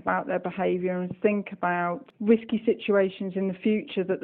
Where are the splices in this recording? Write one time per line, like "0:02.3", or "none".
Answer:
0:02.1